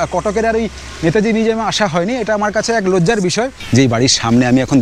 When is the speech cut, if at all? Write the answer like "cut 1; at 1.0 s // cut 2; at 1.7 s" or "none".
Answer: cut 1; at 3.6 s